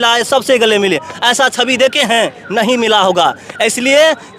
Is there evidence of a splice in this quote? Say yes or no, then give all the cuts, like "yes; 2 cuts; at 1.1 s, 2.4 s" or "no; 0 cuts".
no; 0 cuts